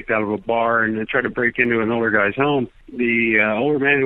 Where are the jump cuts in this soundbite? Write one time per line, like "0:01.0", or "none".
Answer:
0:02.8